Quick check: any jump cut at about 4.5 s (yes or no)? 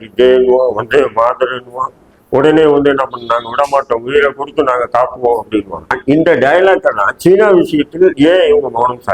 no